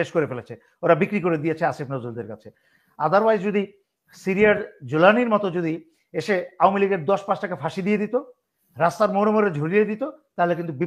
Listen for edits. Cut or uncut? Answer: uncut